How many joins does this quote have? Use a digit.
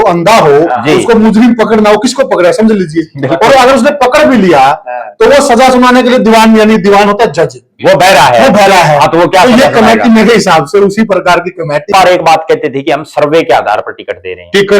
1